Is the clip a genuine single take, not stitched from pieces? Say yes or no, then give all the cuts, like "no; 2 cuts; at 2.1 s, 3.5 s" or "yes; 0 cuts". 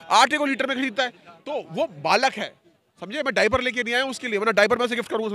yes; 0 cuts